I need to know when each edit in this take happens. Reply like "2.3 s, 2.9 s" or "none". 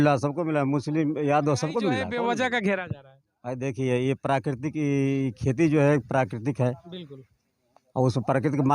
2.0 s